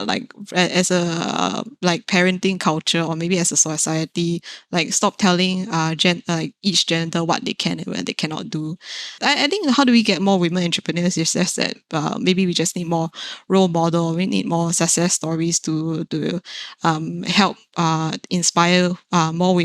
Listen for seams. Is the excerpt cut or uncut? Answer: cut